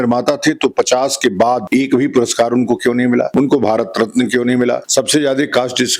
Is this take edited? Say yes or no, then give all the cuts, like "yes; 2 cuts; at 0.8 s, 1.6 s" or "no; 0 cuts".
yes; 3 cuts; at 1.6 s, 3.3 s, 4.8 s